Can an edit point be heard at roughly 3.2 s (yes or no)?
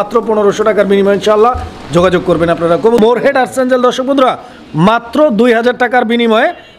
yes